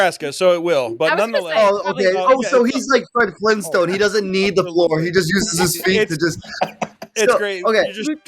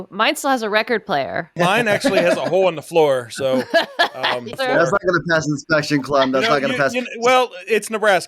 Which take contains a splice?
second; 2 cuts; at 1.5 s, 4.6 s

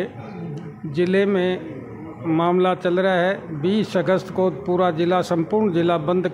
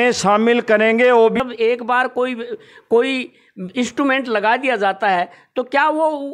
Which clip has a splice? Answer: second; 1 cut; at 1.4 s

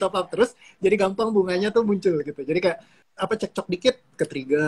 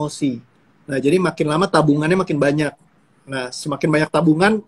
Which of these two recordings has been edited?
first; 1 cut; at 2.9 s

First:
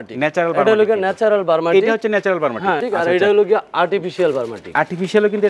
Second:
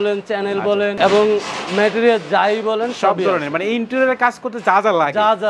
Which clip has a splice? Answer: first; 1 cut; at 2.8 s

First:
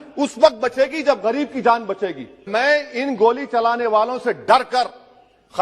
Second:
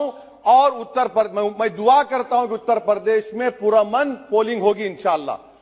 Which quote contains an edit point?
first; 1 cut; at 2.4 s

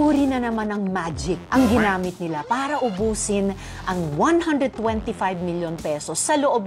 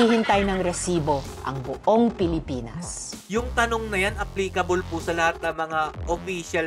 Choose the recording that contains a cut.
first; 1 cut; at 1.4 s

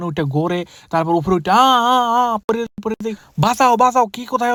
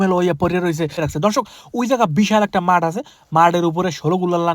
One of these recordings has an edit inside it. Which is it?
second; 1 cut; at 1.0 s

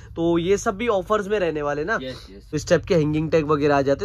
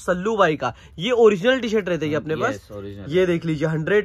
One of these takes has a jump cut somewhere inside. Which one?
first; 1 cut; at 2.4 s

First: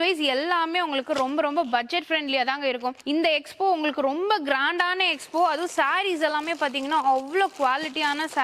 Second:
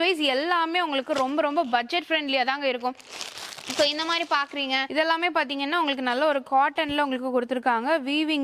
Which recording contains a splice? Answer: first; 1 cut; at 3.0 s

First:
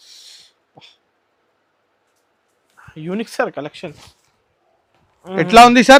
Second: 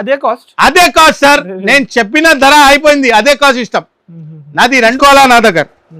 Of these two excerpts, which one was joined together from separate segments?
second; 1 cut; at 5.0 s

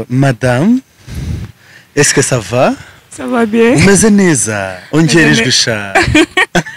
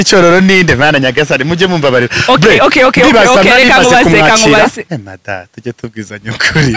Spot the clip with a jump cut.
second; 1 cut; at 4.9 s

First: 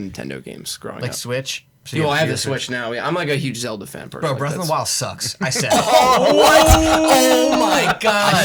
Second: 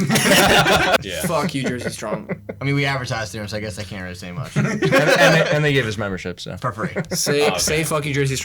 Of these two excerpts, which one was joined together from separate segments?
second; 1 cut; at 1.0 s

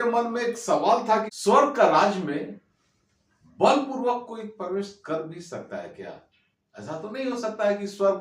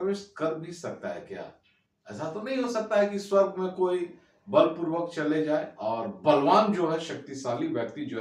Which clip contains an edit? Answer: first; 1 cut; at 1.3 s

